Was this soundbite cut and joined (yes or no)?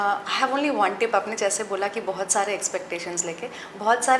no